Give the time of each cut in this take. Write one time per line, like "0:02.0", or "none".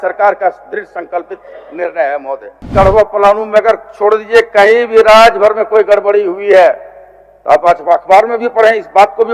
0:02.7